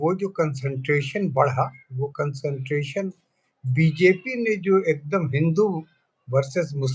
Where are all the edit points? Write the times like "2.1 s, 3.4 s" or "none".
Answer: none